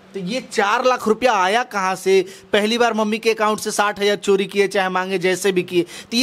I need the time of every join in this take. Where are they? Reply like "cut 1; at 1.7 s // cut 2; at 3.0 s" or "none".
none